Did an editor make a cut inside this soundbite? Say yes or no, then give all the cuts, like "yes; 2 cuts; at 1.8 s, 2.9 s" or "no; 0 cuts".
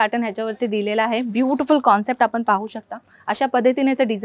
no; 0 cuts